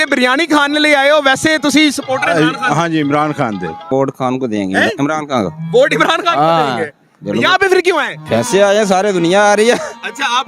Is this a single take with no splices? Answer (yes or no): no